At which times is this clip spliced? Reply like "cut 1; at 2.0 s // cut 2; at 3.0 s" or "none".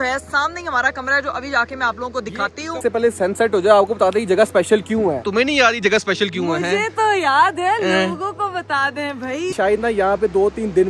cut 1; at 2.8 s // cut 2; at 5.3 s // cut 3; at 9.5 s